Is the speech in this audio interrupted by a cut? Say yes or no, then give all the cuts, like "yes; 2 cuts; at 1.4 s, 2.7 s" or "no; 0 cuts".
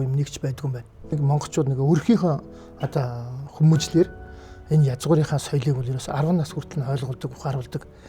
yes; 1 cut; at 1.2 s